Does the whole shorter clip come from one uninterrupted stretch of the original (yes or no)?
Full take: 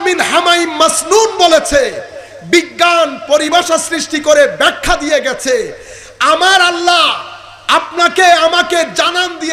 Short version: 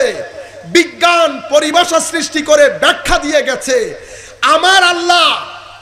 yes